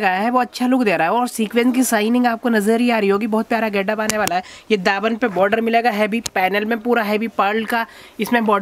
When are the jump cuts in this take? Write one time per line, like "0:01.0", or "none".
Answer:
none